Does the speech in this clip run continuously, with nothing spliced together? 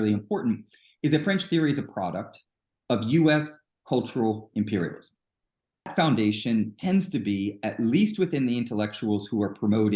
no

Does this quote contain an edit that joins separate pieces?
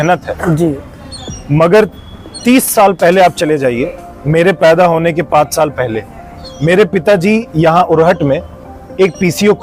no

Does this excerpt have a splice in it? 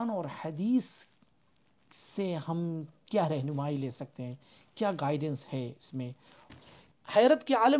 yes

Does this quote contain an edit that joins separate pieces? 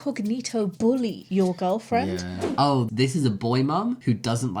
yes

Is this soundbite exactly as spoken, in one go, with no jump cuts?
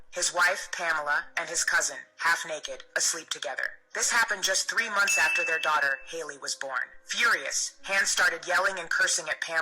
no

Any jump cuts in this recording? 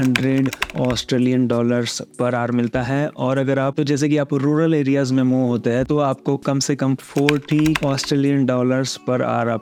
no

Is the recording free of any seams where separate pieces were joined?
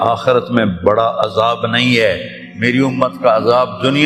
yes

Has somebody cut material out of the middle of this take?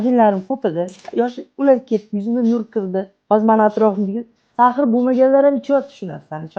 yes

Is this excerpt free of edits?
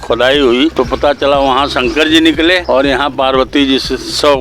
no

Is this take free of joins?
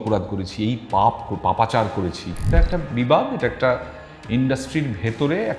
no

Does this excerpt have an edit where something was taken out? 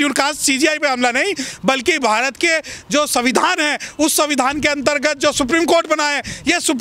no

